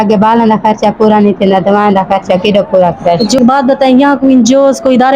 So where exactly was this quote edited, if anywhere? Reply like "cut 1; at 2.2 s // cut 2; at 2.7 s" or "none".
cut 1; at 3.4 s